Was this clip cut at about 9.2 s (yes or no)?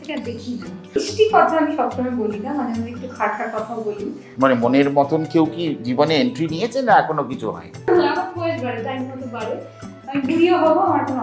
no